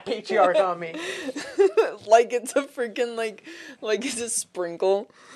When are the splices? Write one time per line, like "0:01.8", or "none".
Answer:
none